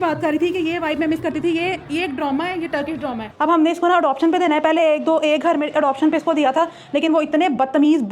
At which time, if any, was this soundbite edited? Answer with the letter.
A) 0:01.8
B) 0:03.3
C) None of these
B